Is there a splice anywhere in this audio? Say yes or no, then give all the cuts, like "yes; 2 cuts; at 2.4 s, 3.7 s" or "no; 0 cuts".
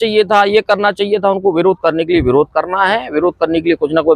no; 0 cuts